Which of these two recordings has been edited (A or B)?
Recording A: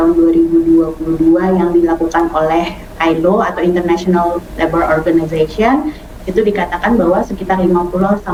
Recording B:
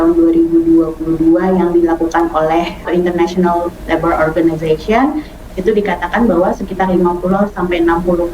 B